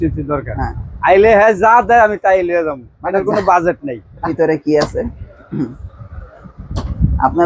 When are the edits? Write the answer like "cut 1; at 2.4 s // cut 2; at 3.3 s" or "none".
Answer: cut 1; at 4.3 s